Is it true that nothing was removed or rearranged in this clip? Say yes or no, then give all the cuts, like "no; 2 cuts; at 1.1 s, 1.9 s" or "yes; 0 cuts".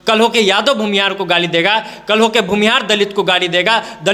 yes; 0 cuts